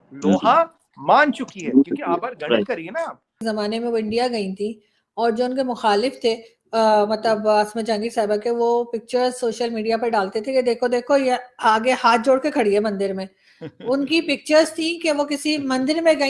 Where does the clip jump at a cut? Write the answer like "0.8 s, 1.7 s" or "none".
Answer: 3.2 s